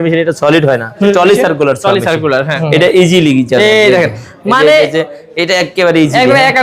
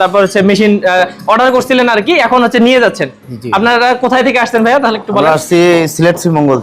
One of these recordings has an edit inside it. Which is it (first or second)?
first